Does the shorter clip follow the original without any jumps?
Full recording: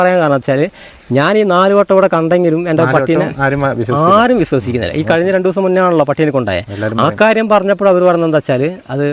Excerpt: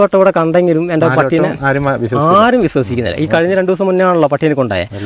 yes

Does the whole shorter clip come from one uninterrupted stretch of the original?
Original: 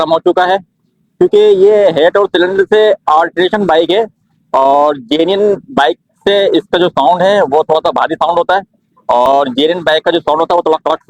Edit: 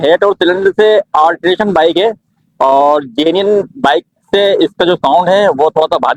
yes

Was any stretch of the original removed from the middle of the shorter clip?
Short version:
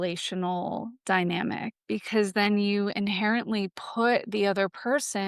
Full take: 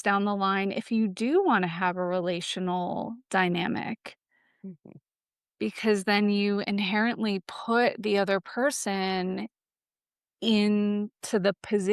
yes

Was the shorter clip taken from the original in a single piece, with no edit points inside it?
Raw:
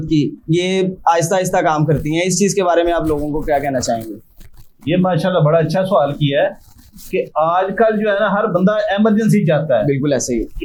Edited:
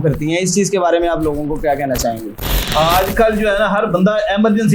no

